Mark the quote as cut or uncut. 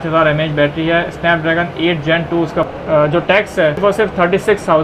cut